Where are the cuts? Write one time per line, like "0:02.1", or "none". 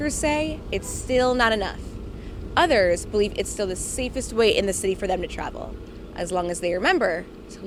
none